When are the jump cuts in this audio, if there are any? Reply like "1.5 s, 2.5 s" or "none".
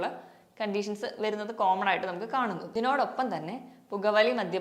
2.6 s